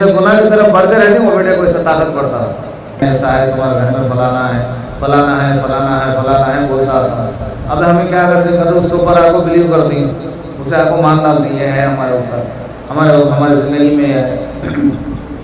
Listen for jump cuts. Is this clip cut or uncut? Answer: cut